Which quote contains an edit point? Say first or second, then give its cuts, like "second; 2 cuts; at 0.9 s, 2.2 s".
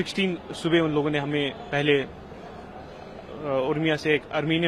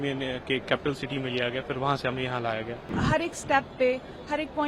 second; 1 cut; at 2.9 s